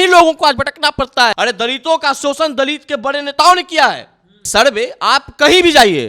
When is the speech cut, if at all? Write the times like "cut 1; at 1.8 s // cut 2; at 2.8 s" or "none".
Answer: cut 1; at 1.3 s // cut 2; at 4.4 s

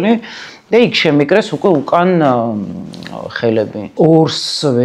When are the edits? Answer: cut 1; at 3.9 s

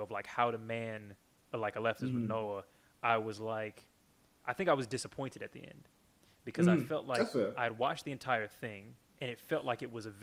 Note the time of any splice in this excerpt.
none

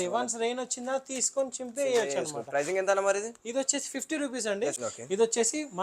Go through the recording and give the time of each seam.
cut 1; at 4.8 s

